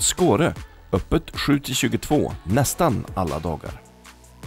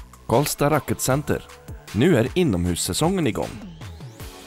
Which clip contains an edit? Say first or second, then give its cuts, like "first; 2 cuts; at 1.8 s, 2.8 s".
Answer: second; 1 cut; at 3.5 s